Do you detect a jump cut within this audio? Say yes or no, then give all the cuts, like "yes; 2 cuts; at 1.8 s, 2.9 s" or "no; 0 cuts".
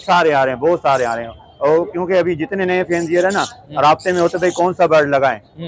no; 0 cuts